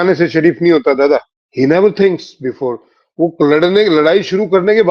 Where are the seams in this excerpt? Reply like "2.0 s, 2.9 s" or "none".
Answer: 1.4 s